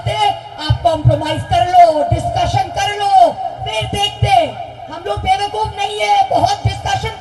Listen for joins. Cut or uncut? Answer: uncut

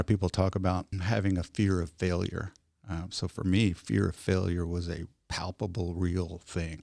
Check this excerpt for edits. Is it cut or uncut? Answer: cut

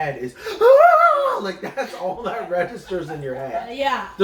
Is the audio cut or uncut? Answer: uncut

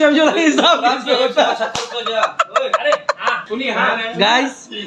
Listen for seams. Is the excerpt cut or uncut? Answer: cut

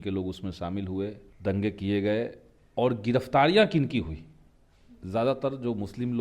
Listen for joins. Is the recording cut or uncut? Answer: cut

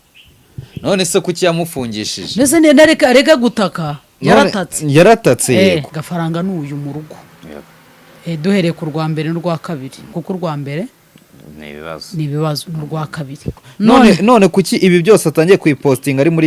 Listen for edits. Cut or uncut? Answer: cut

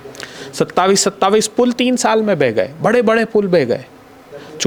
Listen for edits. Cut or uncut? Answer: uncut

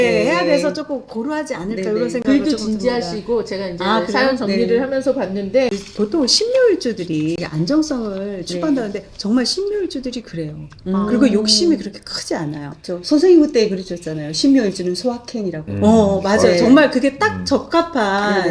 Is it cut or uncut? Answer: cut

